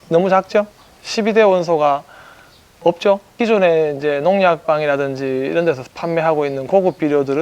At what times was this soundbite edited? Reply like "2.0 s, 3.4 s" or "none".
3.3 s